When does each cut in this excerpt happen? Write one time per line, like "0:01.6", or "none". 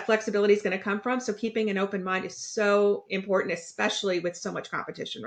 none